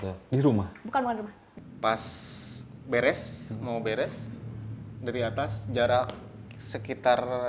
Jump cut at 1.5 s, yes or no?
yes